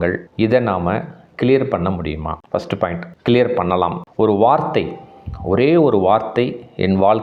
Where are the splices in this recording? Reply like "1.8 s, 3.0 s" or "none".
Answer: 4.0 s